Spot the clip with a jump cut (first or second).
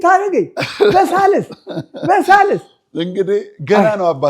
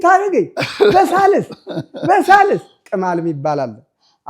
second